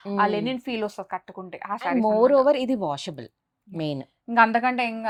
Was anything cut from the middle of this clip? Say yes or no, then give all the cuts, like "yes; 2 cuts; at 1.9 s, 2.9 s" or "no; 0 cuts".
no; 0 cuts